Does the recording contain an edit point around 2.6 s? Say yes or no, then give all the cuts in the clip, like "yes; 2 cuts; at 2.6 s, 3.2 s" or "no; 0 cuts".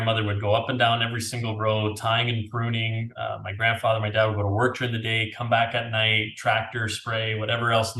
no; 0 cuts